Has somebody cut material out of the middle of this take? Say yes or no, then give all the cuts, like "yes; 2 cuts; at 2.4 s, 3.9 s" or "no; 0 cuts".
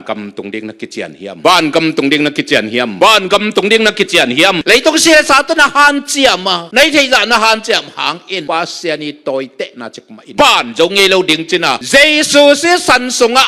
yes; 1 cut; at 4.6 s